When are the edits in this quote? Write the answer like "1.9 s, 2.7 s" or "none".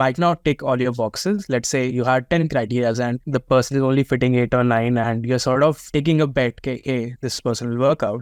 none